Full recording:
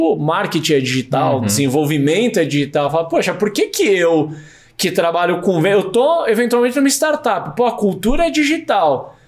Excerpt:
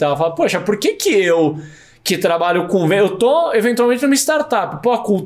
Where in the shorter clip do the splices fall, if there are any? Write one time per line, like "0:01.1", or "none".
none